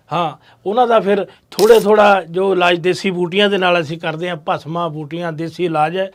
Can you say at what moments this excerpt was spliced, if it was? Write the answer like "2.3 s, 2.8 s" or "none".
none